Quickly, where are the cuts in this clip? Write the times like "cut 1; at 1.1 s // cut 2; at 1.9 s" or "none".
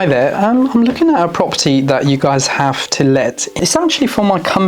cut 1; at 3.6 s